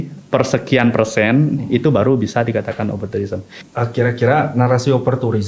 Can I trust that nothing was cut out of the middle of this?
no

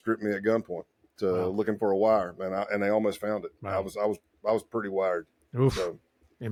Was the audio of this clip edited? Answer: no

